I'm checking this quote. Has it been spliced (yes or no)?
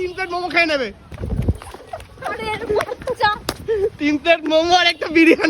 yes